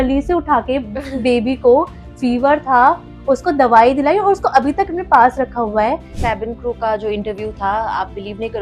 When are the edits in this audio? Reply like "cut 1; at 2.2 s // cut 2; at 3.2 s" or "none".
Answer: cut 1; at 6.1 s